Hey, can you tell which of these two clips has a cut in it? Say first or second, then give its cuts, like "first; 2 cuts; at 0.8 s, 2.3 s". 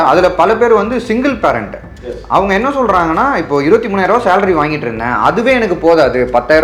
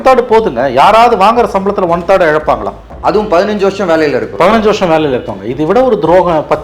second; 1 cut; at 2.9 s